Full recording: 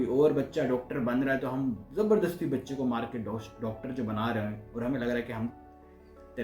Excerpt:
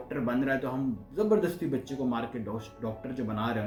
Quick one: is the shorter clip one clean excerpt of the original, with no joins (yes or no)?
yes